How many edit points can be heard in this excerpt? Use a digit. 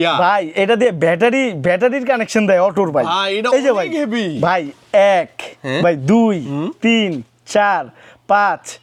0